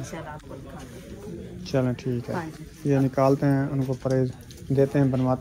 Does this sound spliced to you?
no; 0 cuts

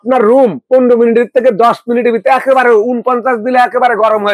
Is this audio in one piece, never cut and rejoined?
yes; 0 cuts

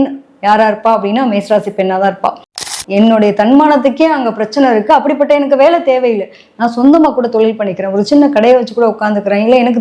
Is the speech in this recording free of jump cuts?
no; 1 cut; at 2.6 s

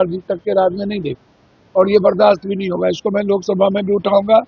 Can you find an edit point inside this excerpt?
no; 0 cuts

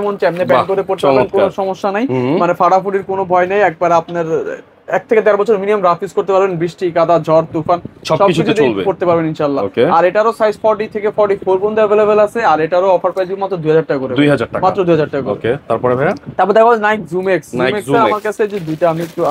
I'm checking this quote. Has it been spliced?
no; 0 cuts

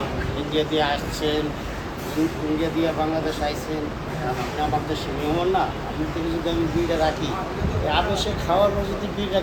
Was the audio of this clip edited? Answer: no; 0 cuts

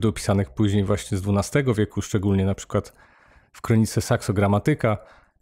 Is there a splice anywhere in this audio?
no; 0 cuts

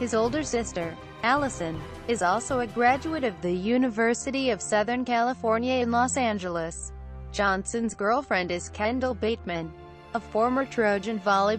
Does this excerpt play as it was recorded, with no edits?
yes; 0 cuts

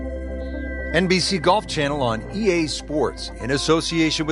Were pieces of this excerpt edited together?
yes; 1 cut; at 0.9 s

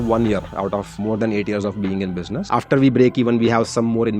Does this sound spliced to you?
yes; 2 cuts; at 0.9 s, 2.4 s

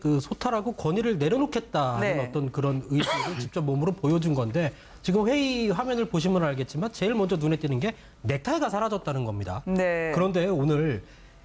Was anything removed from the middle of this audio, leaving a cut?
yes; 1 cut; at 1.6 s

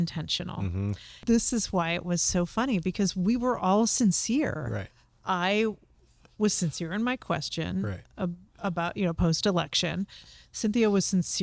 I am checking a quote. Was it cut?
yes; 1 cut; at 1.1 s

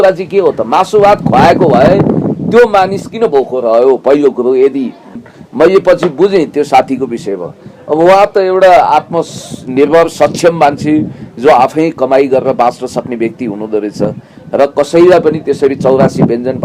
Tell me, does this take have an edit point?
yes; 1 cut; at 5.1 s

